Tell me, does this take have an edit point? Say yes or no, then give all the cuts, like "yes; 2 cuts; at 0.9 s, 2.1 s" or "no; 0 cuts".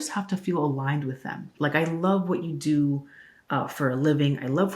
yes; 1 cut; at 1.5 s